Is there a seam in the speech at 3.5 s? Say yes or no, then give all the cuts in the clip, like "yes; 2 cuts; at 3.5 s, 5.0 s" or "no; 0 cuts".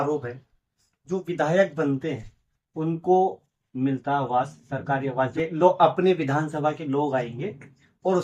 yes; 2 cuts; at 3.5 s, 5.3 s